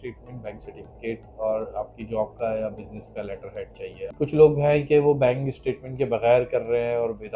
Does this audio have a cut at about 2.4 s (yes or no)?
no